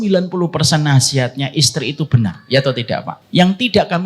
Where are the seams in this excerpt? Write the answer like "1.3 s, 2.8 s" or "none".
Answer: 3.2 s